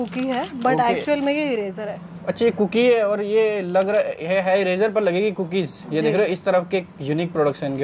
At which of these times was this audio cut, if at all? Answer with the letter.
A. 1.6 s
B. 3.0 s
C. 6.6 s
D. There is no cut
D